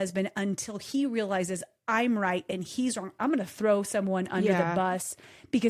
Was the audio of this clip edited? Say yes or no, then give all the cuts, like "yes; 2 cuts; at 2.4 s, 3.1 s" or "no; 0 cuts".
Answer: yes; 1 cut; at 3.2 s